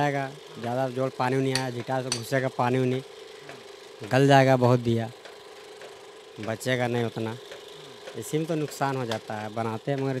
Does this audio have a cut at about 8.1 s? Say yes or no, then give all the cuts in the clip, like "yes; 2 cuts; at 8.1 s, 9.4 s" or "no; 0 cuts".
no; 0 cuts